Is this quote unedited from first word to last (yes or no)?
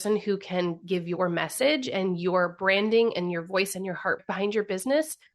no